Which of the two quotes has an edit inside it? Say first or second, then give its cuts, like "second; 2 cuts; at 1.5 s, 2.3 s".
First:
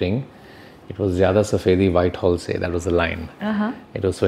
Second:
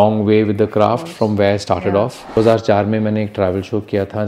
second; 1 cut; at 2.4 s